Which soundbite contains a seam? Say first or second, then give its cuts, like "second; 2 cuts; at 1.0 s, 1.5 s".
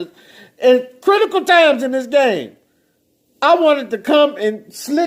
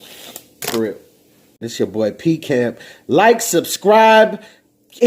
second; 1 cut; at 1.7 s